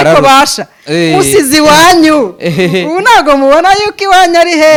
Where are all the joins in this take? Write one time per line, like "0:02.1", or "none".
none